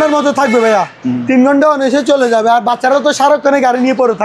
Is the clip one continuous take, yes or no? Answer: yes